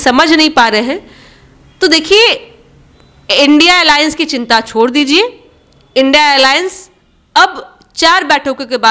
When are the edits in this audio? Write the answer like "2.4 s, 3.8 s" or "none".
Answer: none

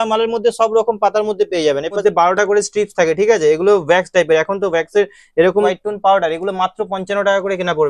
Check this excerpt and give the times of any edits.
2.0 s, 5.8 s

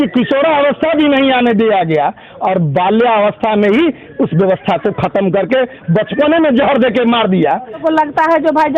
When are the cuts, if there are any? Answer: 7.8 s

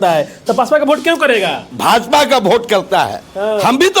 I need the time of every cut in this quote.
1.7 s

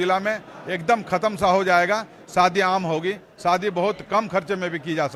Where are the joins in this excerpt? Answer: none

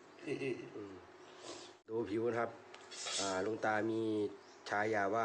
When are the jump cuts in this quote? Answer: 1.9 s

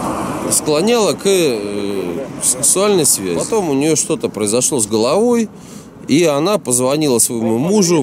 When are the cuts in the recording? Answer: 3.4 s

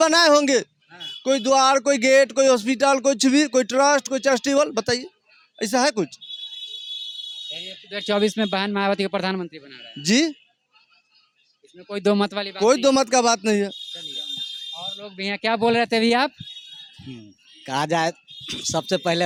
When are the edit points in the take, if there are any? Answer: none

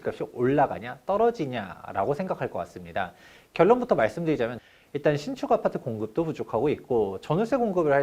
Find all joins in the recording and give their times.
4.6 s

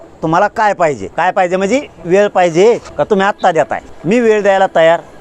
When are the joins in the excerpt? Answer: 1.0 s, 2.9 s, 3.9 s

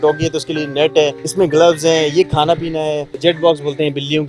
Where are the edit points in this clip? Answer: 1.2 s, 3.1 s

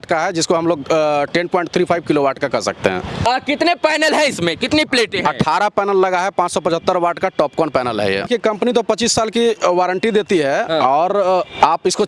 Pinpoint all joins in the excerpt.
3.3 s, 8.3 s

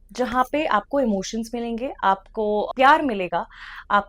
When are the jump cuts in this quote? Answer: 2.7 s

